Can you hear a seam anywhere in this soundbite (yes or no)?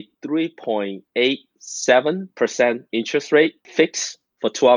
yes